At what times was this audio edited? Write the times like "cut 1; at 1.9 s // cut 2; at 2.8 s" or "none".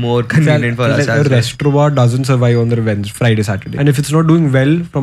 cut 1; at 3.8 s